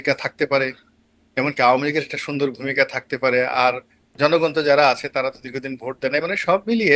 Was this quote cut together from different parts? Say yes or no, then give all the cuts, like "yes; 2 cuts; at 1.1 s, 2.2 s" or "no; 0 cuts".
no; 0 cuts